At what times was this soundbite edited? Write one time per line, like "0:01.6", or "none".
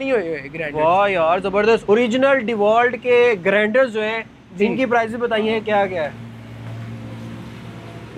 none